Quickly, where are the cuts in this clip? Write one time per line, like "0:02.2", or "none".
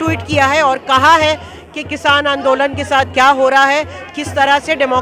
none